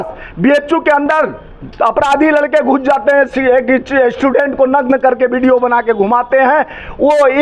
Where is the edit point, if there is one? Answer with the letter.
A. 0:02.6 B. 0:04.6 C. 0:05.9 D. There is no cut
D